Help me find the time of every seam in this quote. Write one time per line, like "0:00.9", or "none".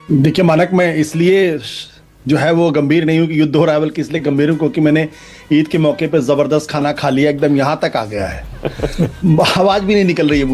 none

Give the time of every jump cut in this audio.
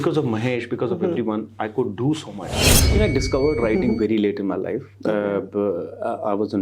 0:02.7

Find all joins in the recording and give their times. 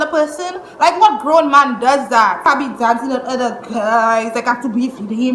0:02.5

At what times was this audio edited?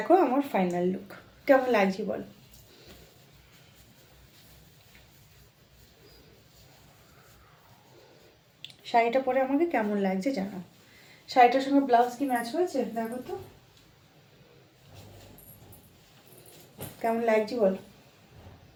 none

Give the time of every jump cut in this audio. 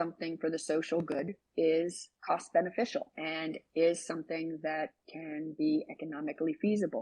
0:02.1
0:03.2

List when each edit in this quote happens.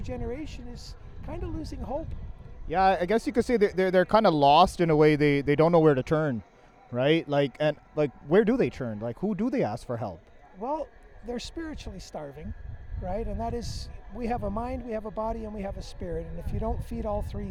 none

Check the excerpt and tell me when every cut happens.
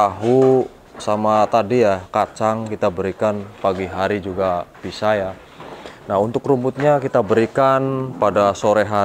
none

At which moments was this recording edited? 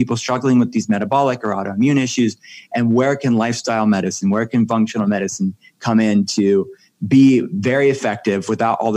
none

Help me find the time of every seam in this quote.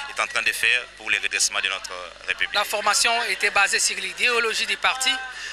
0:02.5

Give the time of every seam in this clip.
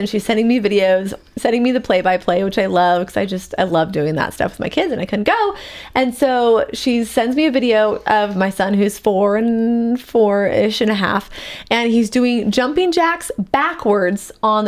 none

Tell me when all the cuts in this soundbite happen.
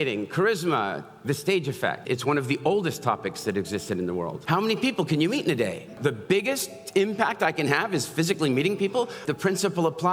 0:02.0
0:04.4
0:06.0
0:09.2

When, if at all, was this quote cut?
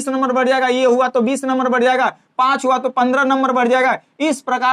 none

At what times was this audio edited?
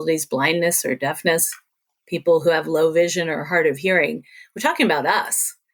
none

